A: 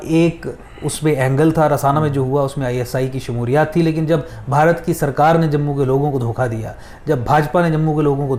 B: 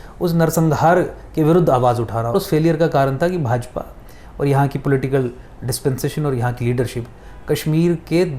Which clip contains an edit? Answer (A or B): B